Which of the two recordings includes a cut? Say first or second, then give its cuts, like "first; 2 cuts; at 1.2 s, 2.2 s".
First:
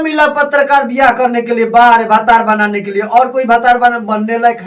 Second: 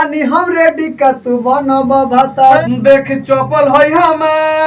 second; 1 cut; at 2.6 s